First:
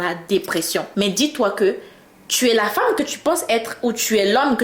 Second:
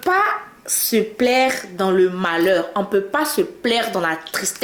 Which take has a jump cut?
first; 1 cut; at 0.9 s

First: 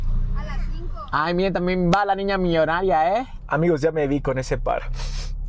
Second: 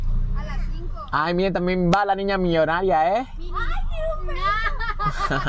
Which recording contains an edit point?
first; 1 cut; at 3.5 s

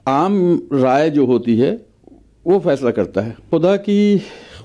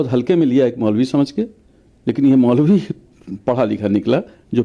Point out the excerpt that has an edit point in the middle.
first; 1 cut; at 3.4 s

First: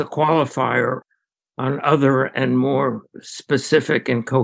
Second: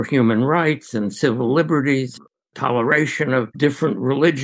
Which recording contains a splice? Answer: second; 1 cut; at 3.5 s

